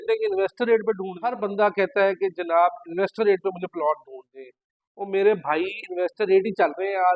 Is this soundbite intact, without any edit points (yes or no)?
no